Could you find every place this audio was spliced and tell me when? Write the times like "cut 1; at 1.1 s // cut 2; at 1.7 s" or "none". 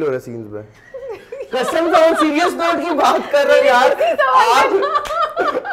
none

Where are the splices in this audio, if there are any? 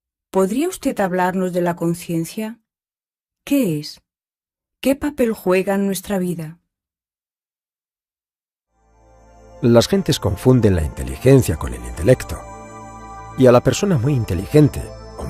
cut 1; at 13.5 s

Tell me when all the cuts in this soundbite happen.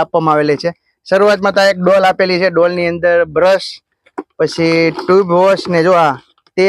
none

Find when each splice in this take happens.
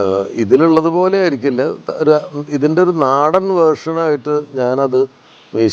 none

